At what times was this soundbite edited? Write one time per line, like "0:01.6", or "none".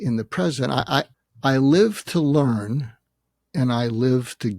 0:01.1

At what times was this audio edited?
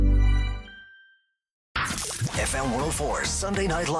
0:01.8

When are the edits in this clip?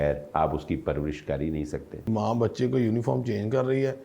0:02.1

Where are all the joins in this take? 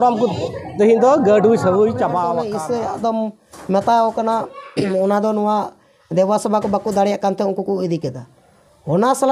0:02.4

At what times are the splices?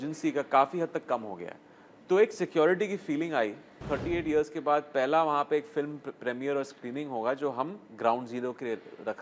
0:03.8

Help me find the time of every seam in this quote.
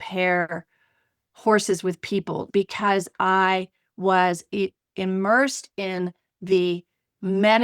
0:02.5

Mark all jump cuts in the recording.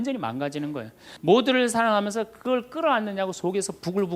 0:01.0

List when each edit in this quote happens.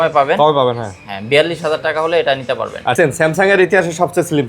0:02.9

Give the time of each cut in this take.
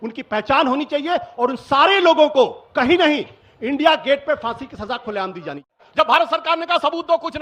0:05.8

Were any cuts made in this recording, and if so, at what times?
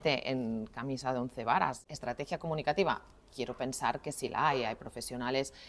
0:01.9

